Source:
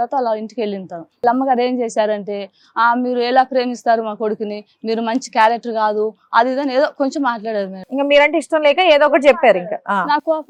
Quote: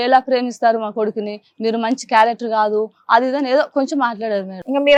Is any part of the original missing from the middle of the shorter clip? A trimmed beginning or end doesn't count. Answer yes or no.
no